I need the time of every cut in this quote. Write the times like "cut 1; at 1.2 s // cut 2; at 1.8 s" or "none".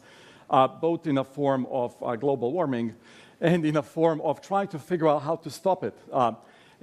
cut 1; at 5.3 s